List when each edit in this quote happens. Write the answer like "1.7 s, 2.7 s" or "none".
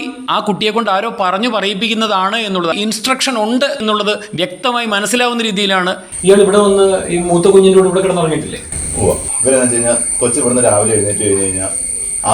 2.7 s, 6.1 s